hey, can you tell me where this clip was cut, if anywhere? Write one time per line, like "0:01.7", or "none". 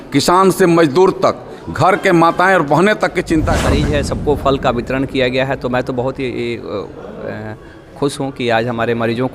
0:03.8